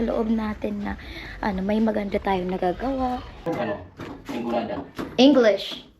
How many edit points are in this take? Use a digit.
1